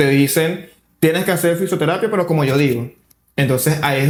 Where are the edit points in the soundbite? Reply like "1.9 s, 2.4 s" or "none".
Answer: none

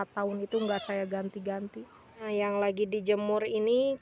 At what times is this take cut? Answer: 2.2 s

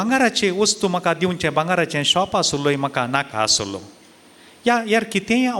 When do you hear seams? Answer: none

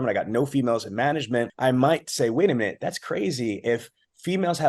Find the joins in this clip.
1.5 s

